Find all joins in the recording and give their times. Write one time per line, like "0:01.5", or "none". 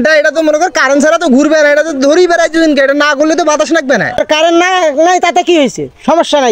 0:04.2